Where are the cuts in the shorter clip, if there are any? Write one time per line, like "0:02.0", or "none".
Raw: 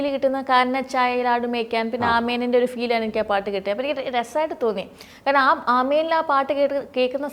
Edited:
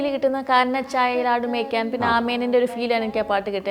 none